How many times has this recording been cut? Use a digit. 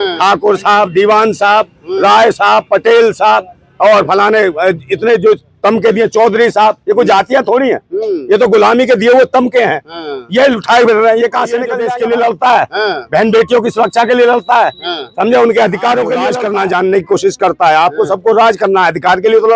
2